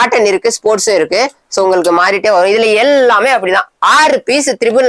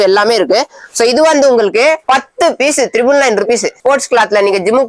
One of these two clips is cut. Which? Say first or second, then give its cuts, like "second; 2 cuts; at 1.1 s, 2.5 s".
second; 2 cuts; at 2.0 s, 3.8 s